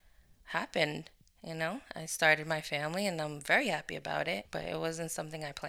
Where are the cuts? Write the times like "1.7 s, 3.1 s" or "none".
4.5 s